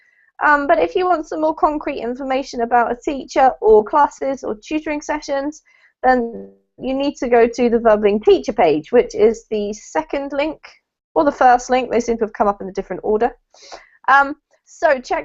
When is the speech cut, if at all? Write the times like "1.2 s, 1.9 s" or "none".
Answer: 1.7 s

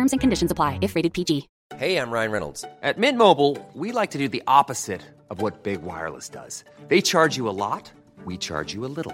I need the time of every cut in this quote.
1.6 s

